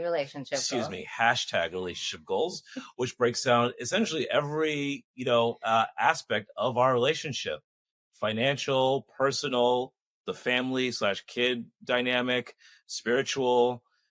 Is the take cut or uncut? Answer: uncut